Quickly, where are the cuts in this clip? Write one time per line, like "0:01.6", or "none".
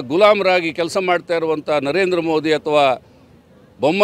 none